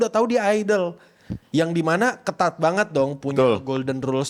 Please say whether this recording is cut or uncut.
uncut